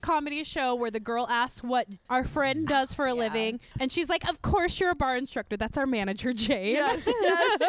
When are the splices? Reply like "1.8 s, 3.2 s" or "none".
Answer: 2.0 s, 3.7 s